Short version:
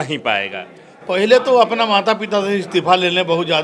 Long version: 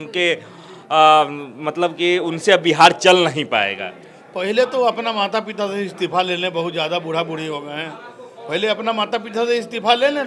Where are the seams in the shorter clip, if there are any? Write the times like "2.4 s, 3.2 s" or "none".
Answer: none